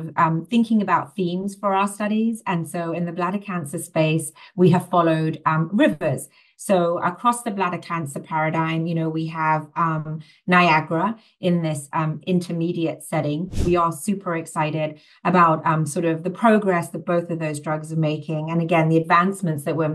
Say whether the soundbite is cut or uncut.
cut